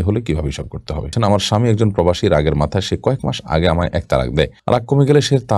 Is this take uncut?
no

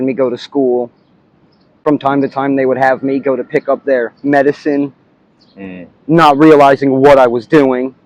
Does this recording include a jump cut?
no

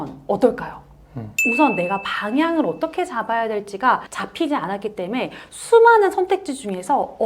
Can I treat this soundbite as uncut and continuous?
no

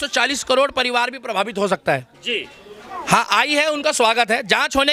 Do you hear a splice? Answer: no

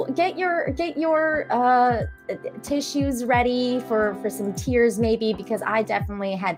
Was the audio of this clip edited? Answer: no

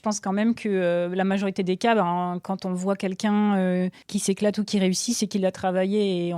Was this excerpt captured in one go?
no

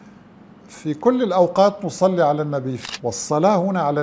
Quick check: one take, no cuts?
no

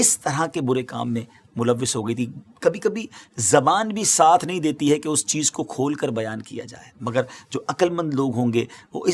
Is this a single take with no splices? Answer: yes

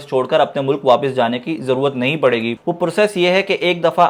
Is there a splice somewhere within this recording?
no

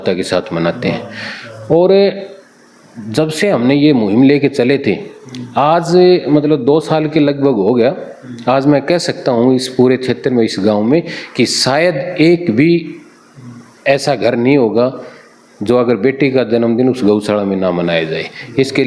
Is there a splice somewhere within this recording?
no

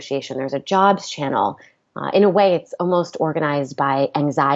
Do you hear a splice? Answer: no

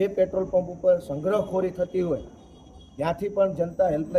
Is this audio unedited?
yes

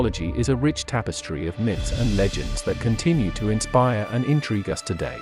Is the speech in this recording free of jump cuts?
yes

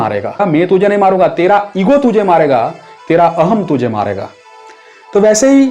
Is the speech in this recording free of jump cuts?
yes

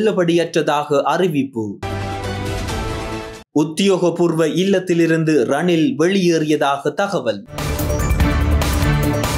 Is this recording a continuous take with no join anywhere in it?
yes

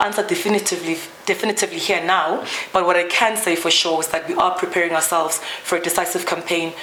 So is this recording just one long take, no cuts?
yes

